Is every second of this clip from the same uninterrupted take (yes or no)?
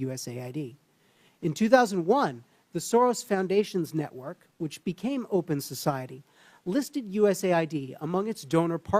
yes